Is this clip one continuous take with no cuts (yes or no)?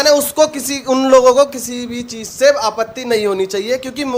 yes